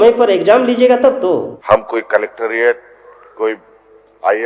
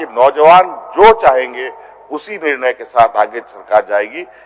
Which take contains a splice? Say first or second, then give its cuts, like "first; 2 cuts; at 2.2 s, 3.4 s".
first; 1 cut; at 1.5 s